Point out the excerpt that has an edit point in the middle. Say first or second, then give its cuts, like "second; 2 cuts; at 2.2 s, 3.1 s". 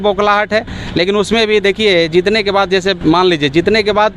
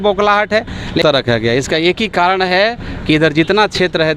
second; 1 cut; at 1.0 s